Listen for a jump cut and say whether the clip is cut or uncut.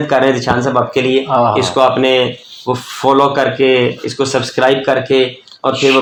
uncut